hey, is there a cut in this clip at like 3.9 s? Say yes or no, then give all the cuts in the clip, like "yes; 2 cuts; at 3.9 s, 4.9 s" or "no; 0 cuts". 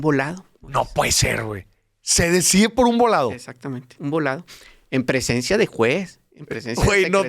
yes; 1 cut; at 3.9 s